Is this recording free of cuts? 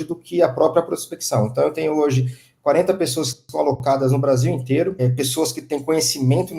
no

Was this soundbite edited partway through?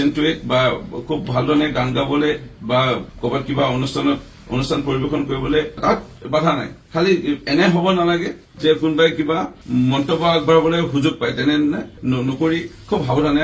no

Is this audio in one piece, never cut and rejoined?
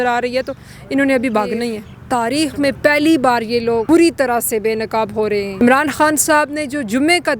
no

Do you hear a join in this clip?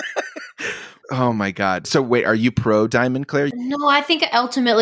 yes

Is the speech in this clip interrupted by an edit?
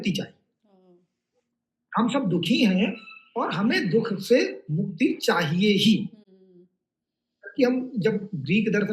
no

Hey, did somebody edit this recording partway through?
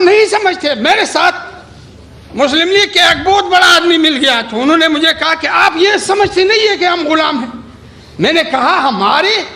no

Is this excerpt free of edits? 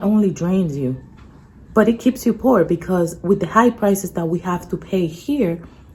yes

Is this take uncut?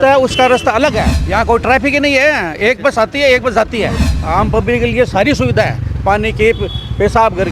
no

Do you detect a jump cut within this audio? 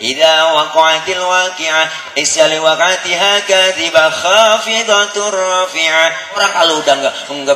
yes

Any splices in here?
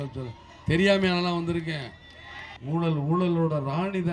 yes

